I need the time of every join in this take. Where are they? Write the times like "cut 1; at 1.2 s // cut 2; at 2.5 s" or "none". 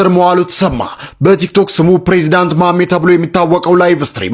none